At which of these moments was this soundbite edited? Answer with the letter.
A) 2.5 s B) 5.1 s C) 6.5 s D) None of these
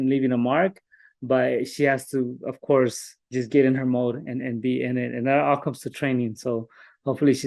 D